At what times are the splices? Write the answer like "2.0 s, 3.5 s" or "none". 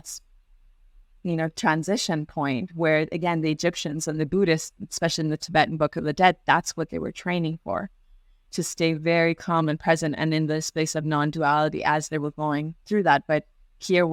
none